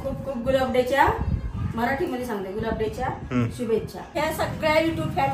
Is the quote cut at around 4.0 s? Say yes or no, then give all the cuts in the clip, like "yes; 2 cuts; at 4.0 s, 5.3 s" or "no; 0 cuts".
yes; 1 cut; at 4.0 s